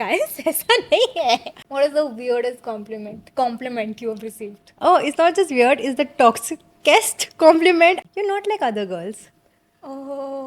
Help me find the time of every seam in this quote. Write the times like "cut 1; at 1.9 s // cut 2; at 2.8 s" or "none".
cut 1; at 1.6 s // cut 2; at 8.0 s